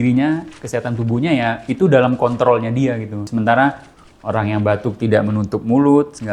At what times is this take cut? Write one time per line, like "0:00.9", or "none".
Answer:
0:03.2